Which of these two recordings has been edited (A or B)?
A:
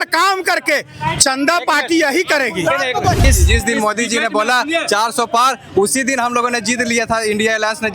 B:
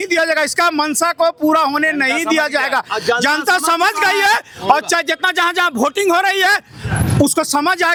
A